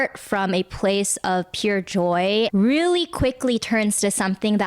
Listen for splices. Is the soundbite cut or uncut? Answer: cut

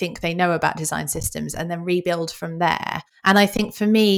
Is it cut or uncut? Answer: cut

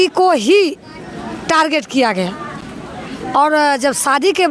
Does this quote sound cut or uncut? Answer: uncut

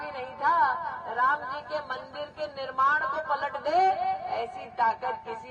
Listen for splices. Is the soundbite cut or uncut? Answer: uncut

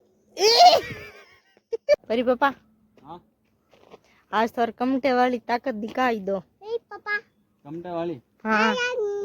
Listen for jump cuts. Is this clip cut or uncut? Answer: cut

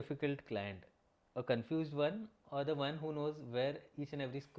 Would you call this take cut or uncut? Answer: uncut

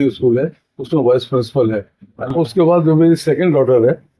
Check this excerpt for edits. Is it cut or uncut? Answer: uncut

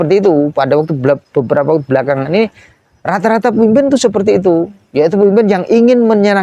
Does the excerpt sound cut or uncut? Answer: uncut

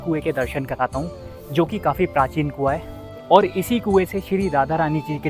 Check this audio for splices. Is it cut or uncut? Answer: uncut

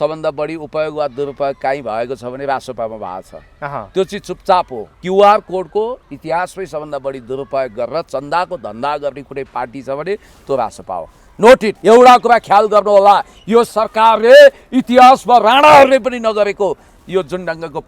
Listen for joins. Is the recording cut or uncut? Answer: cut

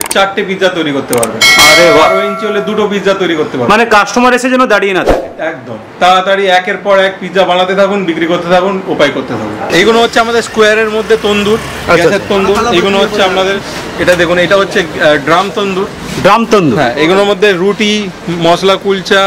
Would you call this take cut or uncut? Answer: cut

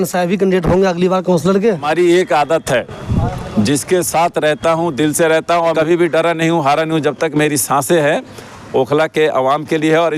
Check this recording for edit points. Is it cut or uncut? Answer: cut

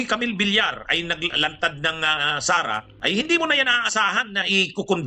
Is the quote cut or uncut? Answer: cut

